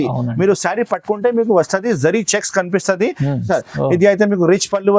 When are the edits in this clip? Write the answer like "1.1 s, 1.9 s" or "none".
3.5 s